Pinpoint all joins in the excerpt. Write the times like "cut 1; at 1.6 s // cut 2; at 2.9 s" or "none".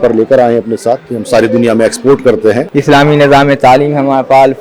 cut 1; at 2.7 s